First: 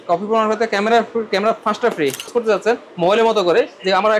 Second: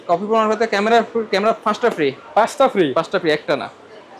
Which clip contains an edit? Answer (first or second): first